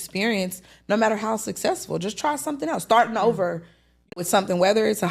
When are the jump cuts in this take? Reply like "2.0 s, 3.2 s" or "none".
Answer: 4.1 s